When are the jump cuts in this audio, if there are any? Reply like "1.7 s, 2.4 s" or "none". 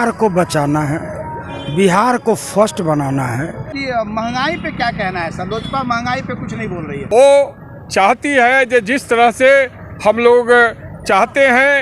3.7 s, 7.0 s